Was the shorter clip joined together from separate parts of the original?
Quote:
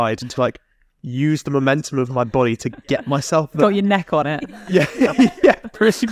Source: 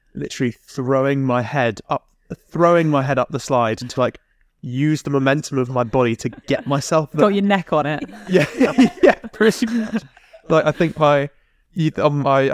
no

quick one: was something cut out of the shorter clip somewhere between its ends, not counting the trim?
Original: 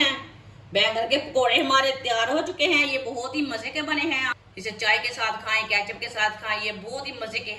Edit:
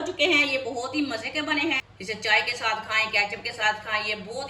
yes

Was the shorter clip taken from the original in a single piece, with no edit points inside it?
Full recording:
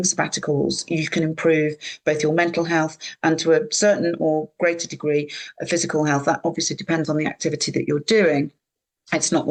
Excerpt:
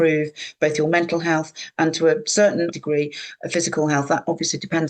no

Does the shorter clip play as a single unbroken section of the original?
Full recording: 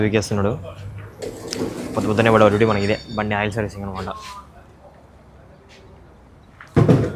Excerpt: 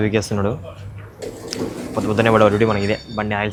yes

